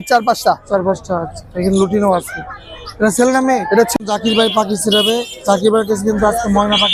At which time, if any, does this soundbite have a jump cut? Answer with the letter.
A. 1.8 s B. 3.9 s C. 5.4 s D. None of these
B